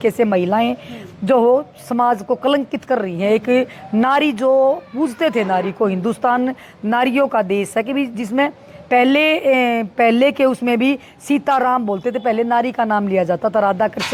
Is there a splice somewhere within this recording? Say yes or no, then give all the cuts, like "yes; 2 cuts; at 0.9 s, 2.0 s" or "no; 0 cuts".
no; 0 cuts